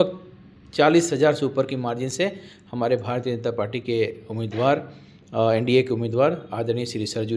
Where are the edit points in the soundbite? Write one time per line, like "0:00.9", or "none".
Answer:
none